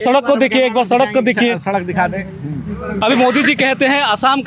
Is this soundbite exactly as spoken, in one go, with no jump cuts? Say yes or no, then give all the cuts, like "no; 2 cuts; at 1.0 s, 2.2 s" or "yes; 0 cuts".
no; 1 cut; at 3.0 s